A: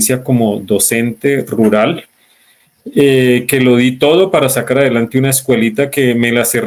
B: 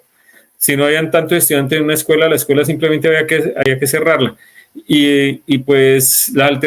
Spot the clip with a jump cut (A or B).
B